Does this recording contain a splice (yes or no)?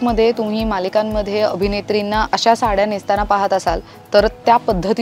yes